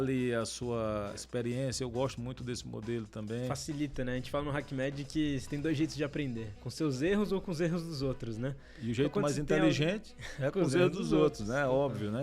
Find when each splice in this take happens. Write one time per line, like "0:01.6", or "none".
0:01.2